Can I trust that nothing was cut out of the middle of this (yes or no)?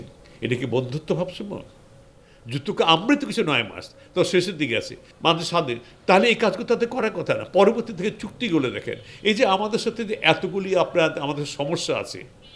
no